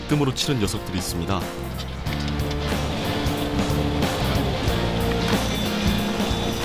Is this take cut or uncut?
uncut